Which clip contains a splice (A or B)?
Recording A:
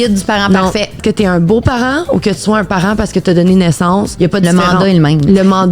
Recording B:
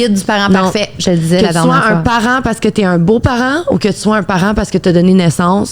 A